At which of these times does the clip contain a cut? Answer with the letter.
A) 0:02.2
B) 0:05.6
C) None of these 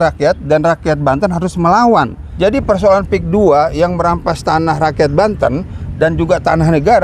A